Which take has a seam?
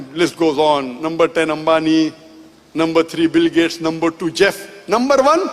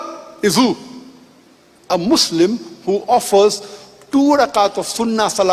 first; 1 cut; at 0.9 s

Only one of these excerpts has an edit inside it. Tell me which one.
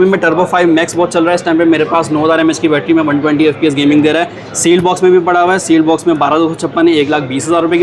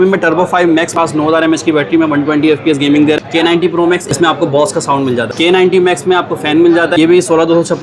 second; 4 cuts; at 0.9 s, 3.7 s, 5.3 s, 6.9 s

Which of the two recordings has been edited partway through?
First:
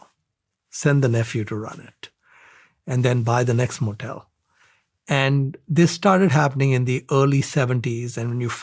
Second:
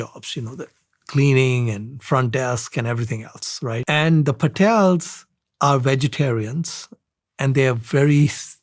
second; 1 cut; at 3.8 s

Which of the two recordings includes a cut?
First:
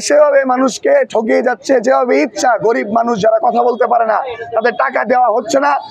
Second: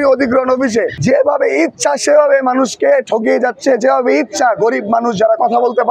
second; 1 cut; at 0.9 s

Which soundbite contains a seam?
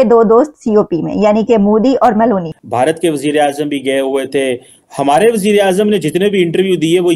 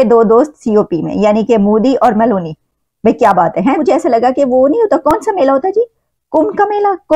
first; 1 cut; at 2.6 s

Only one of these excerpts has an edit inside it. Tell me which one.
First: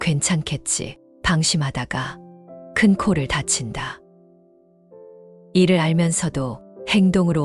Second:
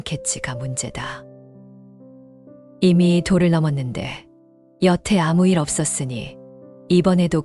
first; 2 cuts; at 4.0 s, 5.5 s

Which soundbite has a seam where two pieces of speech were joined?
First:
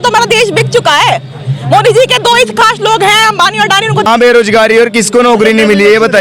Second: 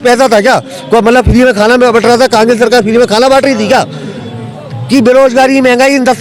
first; 1 cut; at 4.1 s

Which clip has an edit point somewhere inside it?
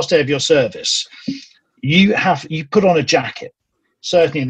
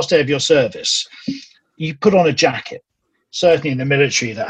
second; 1 cut; at 1.8 s

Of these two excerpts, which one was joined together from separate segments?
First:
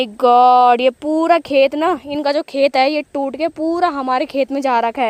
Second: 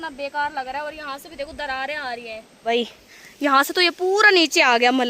second; 1 cut; at 2.7 s

